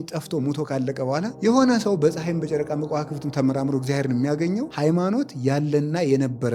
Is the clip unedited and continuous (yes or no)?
no